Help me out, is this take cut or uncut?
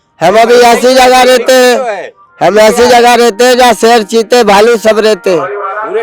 uncut